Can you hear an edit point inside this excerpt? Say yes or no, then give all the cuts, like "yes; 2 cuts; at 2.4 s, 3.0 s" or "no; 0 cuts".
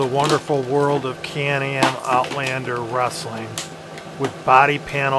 no; 0 cuts